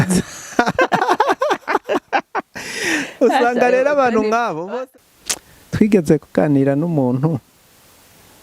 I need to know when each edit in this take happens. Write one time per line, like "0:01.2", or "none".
0:04.8

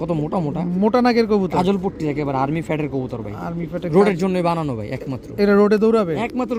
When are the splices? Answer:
none

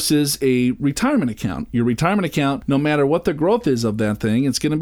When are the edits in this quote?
0:02.6

